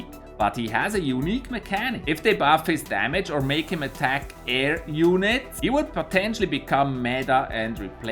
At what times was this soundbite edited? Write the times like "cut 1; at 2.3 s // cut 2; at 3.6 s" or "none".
cut 1; at 6.6 s